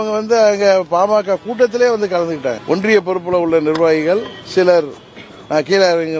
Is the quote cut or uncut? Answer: cut